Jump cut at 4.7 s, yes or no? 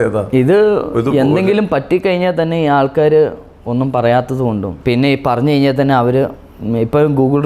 yes